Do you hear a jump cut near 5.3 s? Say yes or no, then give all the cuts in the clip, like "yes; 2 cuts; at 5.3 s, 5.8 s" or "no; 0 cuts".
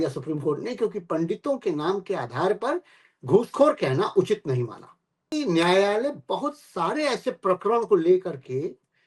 yes; 1 cut; at 5.3 s